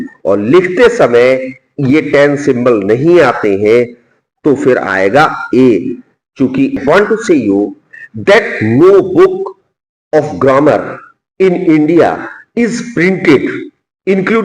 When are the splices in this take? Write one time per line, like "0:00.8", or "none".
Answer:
0:06.8